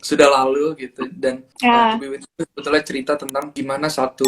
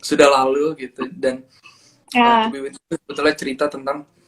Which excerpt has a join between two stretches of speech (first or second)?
first